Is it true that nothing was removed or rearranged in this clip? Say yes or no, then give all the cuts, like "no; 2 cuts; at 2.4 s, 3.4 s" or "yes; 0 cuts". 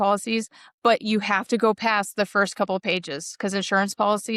yes; 0 cuts